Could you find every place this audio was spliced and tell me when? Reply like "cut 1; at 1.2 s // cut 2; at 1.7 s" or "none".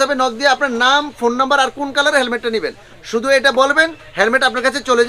none